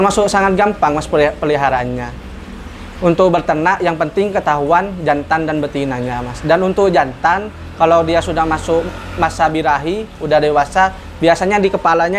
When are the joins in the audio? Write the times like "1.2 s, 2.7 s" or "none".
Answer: none